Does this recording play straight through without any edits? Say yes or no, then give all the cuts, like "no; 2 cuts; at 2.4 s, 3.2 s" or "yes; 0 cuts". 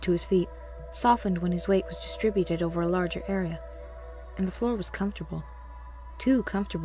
no; 1 cut; at 4.9 s